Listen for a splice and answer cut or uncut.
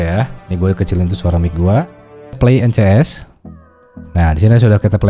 cut